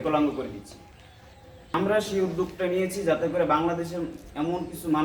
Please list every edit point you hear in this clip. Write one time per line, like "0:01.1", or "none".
0:01.7